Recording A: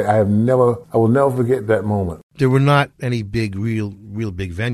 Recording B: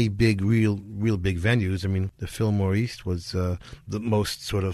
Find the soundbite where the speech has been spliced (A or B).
A